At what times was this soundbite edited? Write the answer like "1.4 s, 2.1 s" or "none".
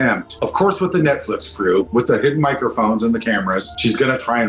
none